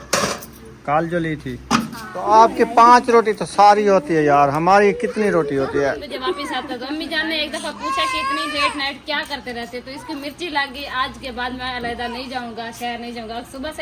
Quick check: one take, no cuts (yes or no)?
no